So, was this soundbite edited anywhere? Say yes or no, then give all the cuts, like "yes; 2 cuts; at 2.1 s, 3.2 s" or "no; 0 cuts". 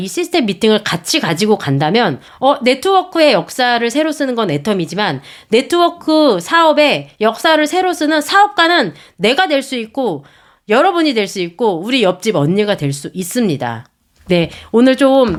no; 0 cuts